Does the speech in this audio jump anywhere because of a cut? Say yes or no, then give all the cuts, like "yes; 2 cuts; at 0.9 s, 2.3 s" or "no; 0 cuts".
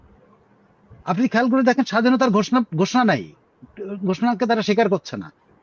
no; 0 cuts